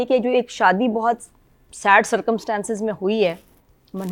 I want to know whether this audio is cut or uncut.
uncut